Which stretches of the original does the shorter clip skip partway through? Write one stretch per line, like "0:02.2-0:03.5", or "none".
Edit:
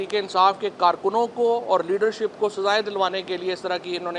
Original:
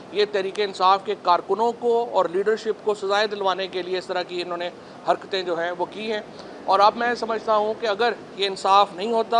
none